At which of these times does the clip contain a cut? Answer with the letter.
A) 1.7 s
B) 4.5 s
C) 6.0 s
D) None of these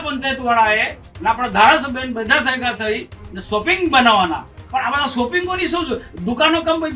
B